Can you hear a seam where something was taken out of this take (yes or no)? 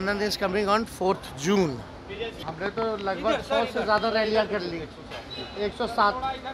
yes